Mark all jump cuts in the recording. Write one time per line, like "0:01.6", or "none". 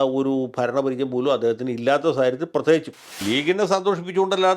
0:03.2